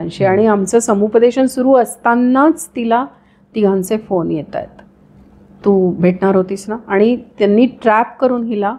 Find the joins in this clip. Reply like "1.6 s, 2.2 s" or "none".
none